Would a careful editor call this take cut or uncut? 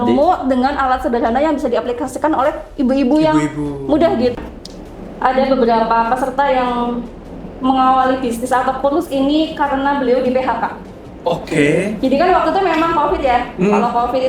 cut